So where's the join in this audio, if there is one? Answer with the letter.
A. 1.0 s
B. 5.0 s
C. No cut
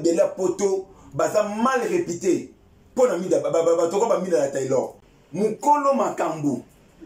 B